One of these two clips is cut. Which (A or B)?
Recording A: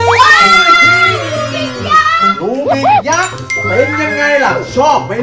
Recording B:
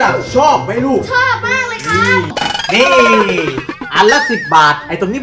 B